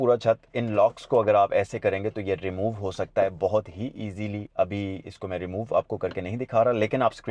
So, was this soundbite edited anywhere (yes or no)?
no